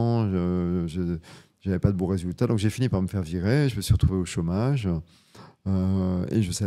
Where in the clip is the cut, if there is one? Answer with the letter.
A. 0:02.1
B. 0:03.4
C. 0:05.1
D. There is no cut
D